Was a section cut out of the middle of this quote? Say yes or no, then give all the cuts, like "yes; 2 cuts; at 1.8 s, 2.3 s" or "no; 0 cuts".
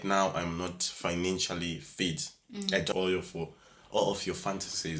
yes; 1 cut; at 2.9 s